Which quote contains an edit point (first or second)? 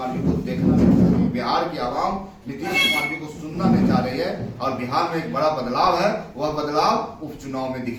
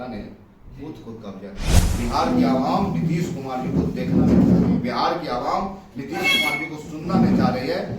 second